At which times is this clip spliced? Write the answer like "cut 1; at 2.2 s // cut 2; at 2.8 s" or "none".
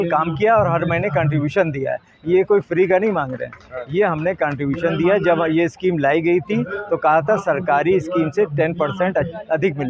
none